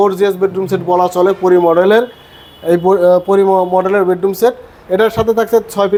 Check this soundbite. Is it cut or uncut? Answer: uncut